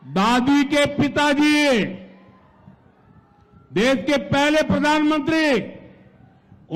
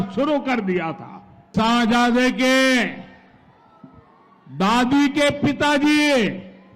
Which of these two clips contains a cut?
second; 1 cut; at 1.5 s

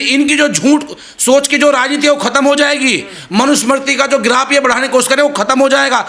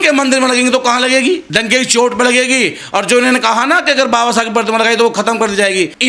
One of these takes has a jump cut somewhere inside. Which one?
second; 1 cut; at 1.5 s

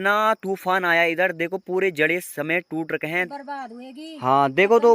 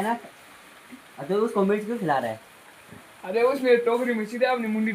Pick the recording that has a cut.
first; 1 cut; at 3.3 s

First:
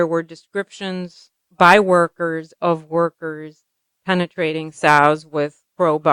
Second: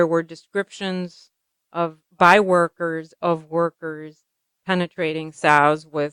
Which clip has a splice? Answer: first; 1 cut; at 1.4 s

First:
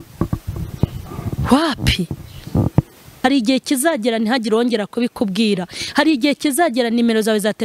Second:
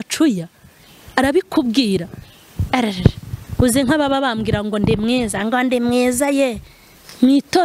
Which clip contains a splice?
first; 1 cut; at 3.0 s

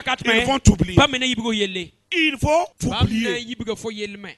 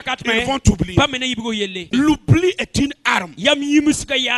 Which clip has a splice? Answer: second; 1 cut; at 1.9 s

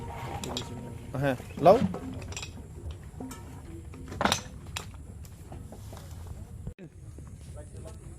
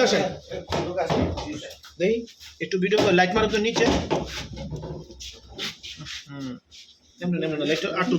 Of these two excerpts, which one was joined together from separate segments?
first; 1 cut; at 6.8 s

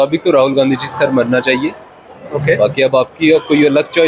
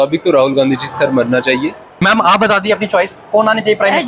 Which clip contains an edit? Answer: second; 1 cut; at 1.8 s

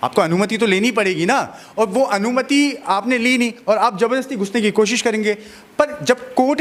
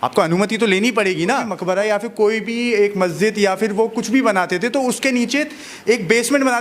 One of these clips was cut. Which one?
second; 1 cut; at 1.5 s

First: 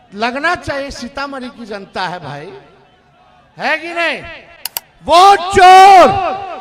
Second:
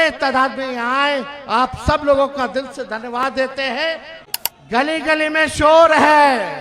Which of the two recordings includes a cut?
second; 1 cut; at 4.1 s

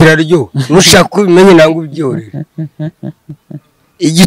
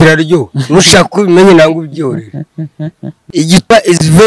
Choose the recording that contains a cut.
second; 1 cut; at 3.1 s

